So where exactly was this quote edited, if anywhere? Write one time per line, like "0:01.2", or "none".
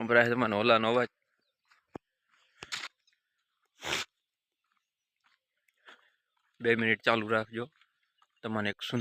none